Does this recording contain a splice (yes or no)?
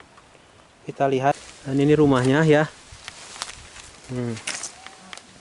yes